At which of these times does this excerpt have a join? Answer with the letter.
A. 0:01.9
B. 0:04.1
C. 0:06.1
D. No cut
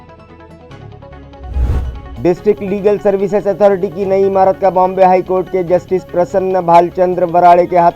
A